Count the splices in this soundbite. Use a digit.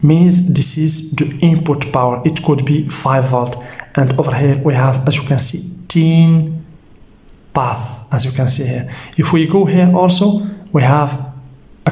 0